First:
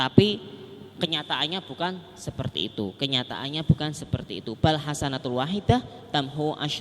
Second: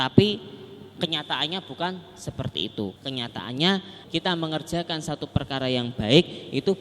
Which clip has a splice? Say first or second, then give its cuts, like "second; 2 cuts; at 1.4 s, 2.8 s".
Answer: second; 2 cuts; at 2.9 s, 4.0 s